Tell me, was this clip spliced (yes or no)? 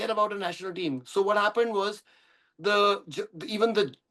no